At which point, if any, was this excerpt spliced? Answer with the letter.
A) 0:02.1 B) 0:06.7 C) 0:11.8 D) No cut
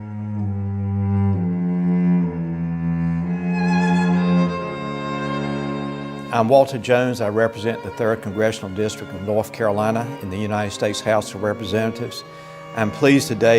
A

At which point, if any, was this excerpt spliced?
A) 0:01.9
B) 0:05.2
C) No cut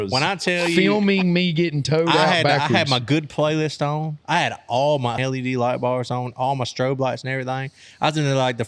B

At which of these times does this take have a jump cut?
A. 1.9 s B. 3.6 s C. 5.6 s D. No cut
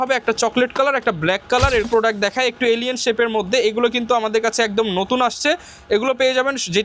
A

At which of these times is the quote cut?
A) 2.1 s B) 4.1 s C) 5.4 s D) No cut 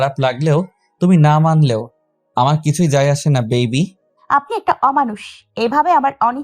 B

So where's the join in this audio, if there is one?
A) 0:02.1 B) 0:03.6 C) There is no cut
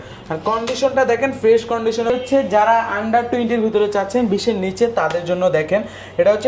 A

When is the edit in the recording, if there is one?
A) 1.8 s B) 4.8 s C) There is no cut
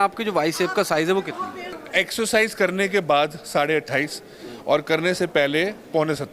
A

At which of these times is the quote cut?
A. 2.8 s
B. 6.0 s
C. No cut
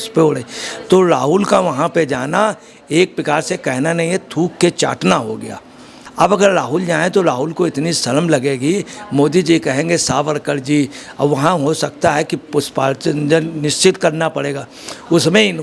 B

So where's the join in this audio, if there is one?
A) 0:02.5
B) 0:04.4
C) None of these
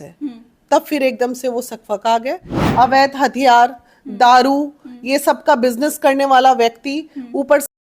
A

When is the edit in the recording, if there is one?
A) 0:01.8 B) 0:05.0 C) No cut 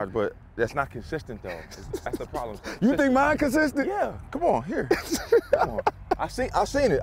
C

